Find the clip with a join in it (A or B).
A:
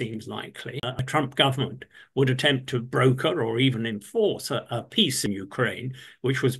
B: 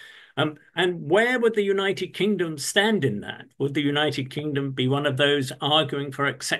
A